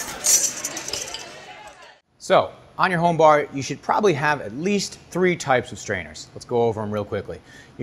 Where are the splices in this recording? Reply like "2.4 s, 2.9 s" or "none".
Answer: 1.5 s